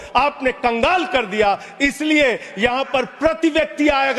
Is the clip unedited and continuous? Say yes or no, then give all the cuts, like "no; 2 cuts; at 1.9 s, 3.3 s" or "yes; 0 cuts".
yes; 0 cuts